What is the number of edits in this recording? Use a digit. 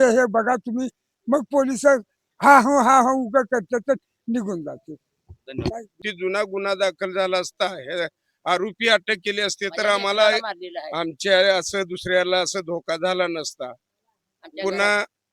1